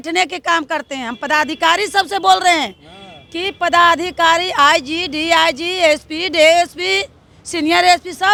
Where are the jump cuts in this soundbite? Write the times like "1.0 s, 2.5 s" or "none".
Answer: none